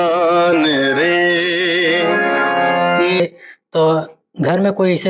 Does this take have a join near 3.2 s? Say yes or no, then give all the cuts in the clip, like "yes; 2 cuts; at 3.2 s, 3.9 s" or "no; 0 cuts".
yes; 1 cut; at 3.2 s